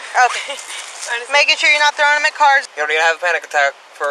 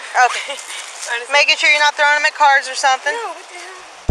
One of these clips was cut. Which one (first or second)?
first